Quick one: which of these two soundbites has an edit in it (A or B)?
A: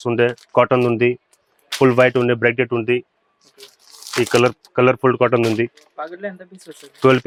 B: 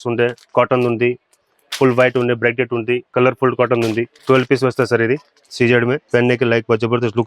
B